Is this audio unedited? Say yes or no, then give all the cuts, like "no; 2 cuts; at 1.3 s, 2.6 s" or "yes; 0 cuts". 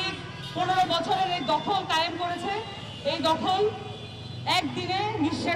yes; 0 cuts